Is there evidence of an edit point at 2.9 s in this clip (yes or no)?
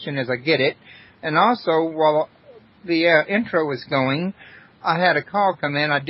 yes